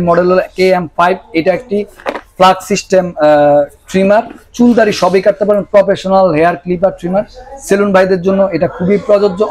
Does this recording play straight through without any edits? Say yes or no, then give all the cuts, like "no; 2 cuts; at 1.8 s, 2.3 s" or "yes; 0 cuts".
yes; 0 cuts